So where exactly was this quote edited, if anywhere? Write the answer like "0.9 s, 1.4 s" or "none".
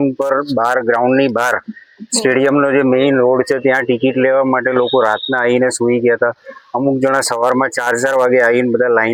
none